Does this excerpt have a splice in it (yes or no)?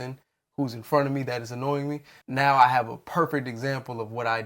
yes